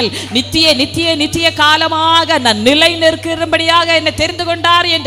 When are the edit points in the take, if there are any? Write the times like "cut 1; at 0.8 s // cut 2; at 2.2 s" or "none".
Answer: none